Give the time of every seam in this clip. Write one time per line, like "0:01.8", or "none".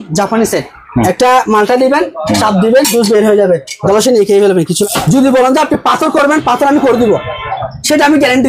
0:00.9
0:04.8